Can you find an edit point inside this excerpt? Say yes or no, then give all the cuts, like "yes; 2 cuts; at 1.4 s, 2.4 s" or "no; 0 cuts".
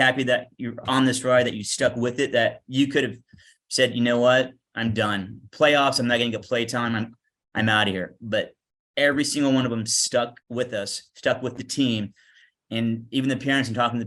yes; 1 cut; at 10.4 s